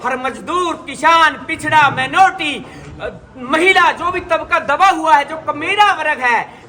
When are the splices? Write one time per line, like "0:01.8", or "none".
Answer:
none